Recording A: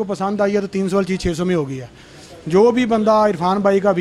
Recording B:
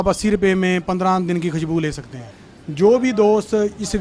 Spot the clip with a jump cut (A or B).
B